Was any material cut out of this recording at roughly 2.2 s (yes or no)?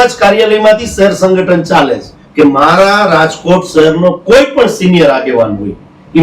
yes